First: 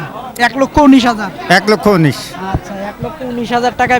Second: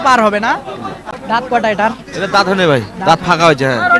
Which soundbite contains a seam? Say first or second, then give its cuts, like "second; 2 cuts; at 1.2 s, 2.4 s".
second; 1 cut; at 1.0 s